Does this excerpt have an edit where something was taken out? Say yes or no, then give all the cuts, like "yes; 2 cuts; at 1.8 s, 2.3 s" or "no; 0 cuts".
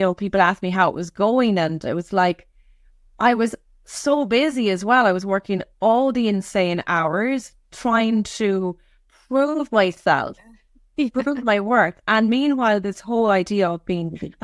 no; 0 cuts